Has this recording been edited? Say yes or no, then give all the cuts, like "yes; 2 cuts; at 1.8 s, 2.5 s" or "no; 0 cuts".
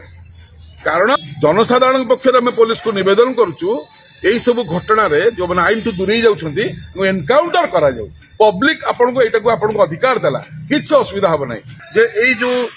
yes; 2 cuts; at 1.2 s, 11.8 s